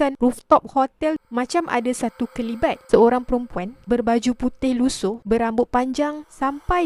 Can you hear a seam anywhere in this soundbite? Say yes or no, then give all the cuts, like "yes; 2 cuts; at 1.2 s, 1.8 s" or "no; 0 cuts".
no; 0 cuts